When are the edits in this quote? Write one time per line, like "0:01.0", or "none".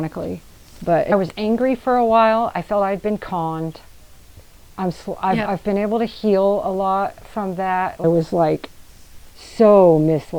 0:01.1
0:08.0

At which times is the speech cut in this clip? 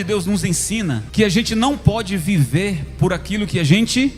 0:01.0

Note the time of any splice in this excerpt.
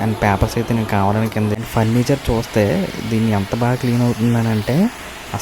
0:01.6

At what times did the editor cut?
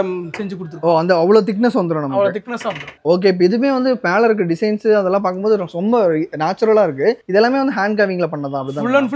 none

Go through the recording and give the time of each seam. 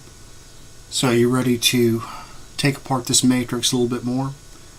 none

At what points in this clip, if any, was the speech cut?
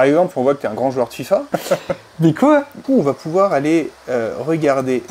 none

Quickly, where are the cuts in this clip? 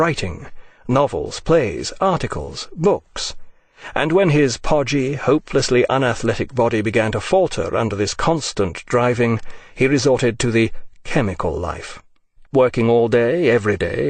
0:02.2

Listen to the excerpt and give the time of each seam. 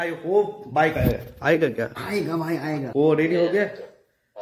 0:02.9

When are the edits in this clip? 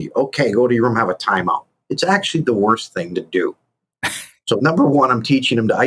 0:04.6

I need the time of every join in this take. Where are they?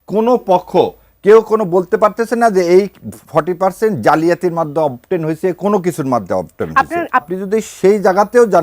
0:07.2

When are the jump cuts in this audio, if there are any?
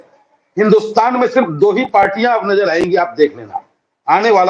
none

